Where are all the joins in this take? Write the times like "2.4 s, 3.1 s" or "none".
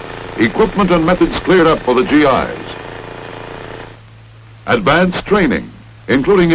5.2 s